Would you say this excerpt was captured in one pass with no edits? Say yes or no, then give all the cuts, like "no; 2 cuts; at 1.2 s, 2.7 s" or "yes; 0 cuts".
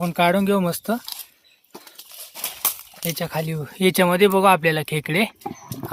yes; 0 cuts